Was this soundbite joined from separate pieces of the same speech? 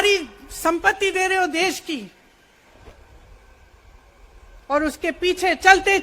yes; 1 cut; at 2.7 s

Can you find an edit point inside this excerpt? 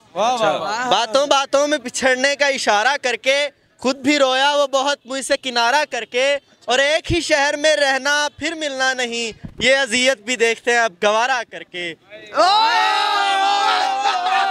no; 0 cuts

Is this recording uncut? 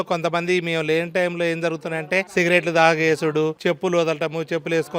no; 2 cuts; at 2.3 s, 3.6 s

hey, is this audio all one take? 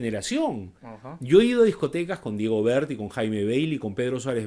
yes; 0 cuts

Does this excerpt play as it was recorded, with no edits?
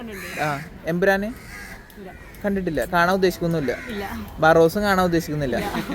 yes; 0 cuts

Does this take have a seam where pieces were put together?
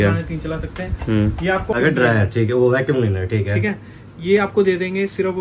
yes; 1 cut; at 1.7 s

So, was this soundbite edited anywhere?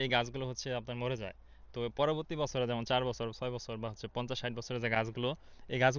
no; 0 cuts

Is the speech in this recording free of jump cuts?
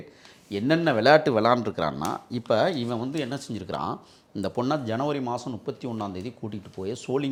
yes; 0 cuts

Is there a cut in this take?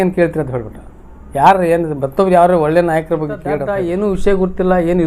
yes; 1 cut; at 3.6 s

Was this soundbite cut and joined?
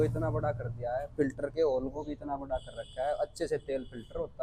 no; 0 cuts

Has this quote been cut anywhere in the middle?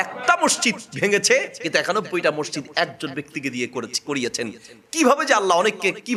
no; 0 cuts

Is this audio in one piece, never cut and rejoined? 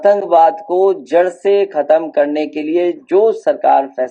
yes; 0 cuts

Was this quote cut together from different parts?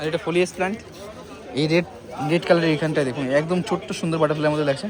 no; 0 cuts

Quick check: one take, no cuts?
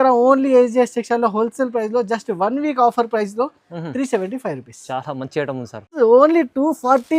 no; 1 cut; at 5.9 s

